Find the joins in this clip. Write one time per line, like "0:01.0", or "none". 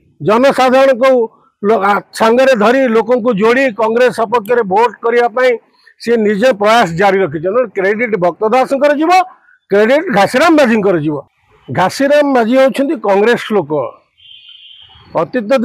0:11.3